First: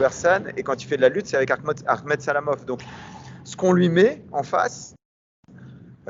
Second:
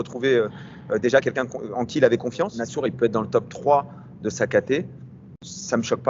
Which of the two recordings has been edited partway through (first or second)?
second